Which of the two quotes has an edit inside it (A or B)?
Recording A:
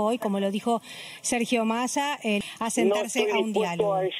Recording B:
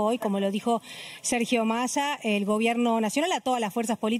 A